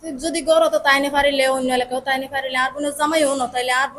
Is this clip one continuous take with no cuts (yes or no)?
yes